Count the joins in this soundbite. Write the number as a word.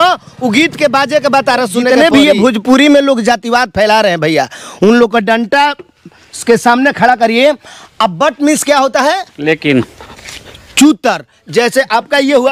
one